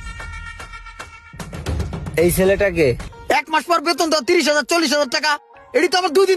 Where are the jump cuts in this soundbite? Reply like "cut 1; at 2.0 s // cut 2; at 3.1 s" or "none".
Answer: cut 1; at 3.1 s